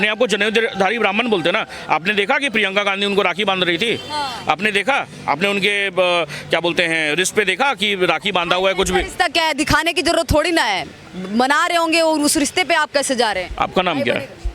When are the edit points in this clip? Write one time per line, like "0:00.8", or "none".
none